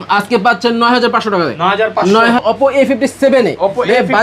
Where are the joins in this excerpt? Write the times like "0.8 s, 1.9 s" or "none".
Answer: 2.4 s